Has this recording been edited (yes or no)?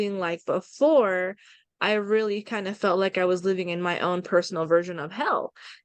no